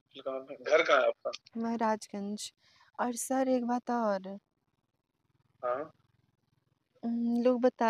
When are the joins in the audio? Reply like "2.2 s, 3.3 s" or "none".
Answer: 1.4 s

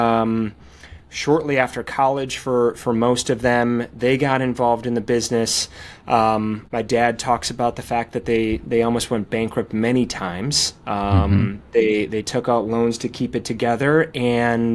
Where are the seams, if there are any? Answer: 6.6 s

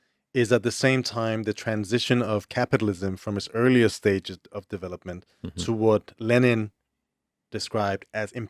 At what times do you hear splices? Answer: none

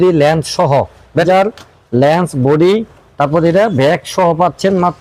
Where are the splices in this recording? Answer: 1.2 s

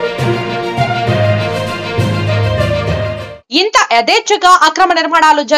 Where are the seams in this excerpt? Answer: 3.3 s

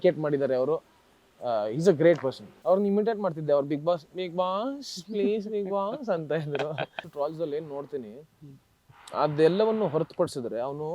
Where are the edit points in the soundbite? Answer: 2.5 s, 7.0 s

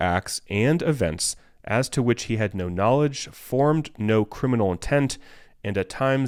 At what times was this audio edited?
none

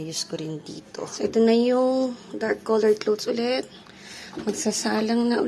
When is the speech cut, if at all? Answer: 1.1 s

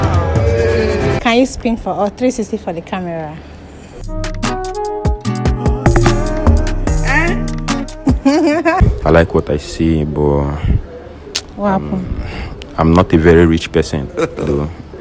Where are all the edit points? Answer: 1.2 s, 8.8 s

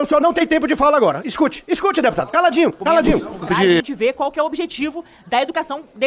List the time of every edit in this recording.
3.8 s

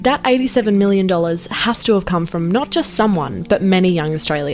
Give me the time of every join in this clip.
none

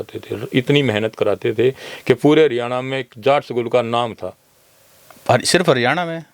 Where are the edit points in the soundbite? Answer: none

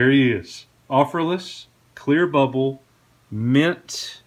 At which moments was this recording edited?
none

